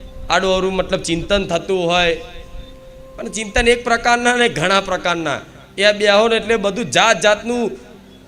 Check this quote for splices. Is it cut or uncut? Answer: uncut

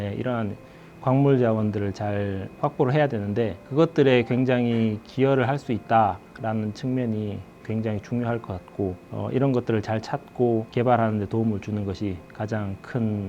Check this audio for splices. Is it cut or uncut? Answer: uncut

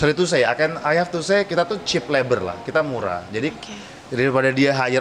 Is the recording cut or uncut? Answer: uncut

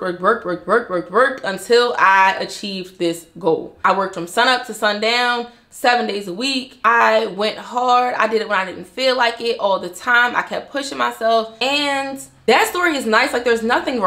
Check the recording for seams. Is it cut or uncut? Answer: cut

